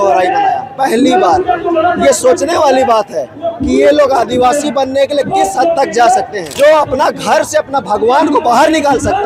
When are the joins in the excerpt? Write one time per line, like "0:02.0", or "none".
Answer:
0:06.4